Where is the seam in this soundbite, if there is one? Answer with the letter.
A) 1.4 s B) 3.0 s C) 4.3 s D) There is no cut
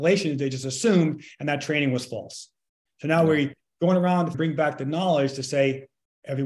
C